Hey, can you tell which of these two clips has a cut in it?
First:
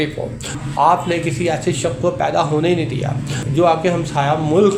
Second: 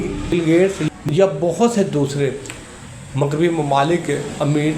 second; 1 cut; at 1.0 s

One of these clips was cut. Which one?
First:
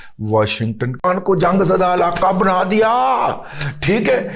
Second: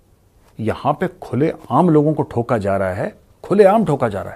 first; 1 cut; at 0.9 s

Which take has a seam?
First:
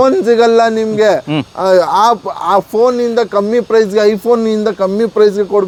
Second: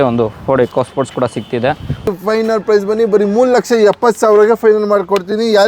second; 1 cut; at 2.1 s

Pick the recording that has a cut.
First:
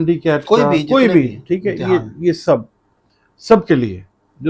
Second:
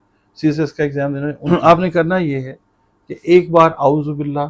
second; 1 cut; at 1.5 s

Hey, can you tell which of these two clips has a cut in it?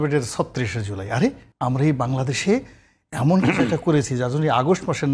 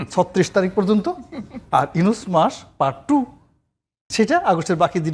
first; 1 cut; at 1.5 s

